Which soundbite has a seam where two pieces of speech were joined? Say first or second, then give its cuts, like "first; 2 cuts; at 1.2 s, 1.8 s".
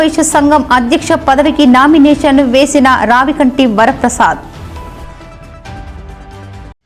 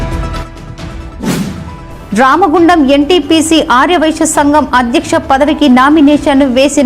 second; 1 cut; at 1.4 s